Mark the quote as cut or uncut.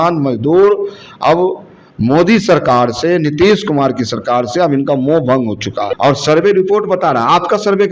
cut